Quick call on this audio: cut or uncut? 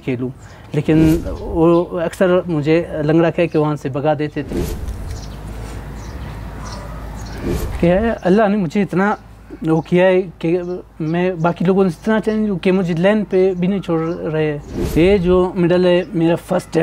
cut